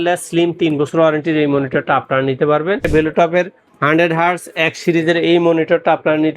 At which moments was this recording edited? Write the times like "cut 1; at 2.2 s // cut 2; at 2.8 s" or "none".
cut 1; at 2.9 s